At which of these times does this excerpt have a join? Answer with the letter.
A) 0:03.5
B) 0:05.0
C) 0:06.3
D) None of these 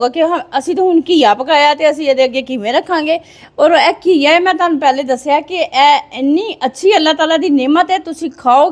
D